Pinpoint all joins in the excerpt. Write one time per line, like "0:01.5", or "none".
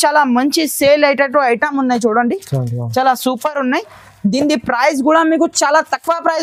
none

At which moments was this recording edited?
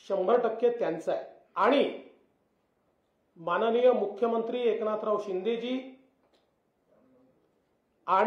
0:01.4

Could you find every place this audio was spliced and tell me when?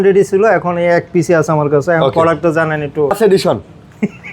0:03.1

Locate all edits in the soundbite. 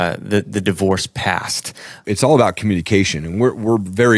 0:02.0

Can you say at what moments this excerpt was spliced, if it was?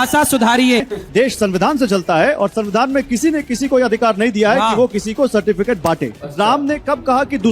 0:01.0
0:06.2

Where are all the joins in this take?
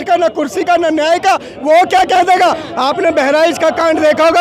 0:02.6

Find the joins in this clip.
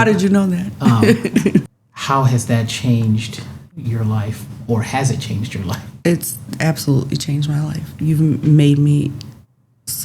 0:01.8

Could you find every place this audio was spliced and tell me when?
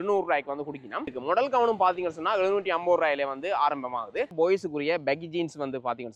0:01.1
0:04.3

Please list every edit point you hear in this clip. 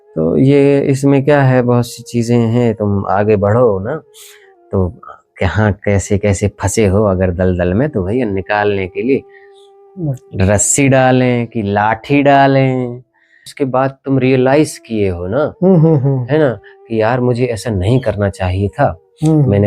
0:13.5

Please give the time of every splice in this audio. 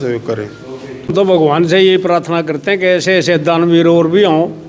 0:01.1

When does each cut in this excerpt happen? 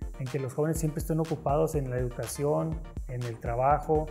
none

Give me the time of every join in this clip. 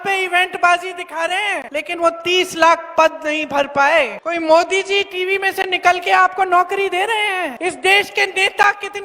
0:01.6
0:04.2
0:07.5

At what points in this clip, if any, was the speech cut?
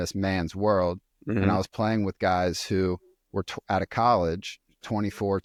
none

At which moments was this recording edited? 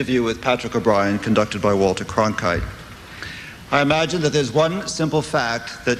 none

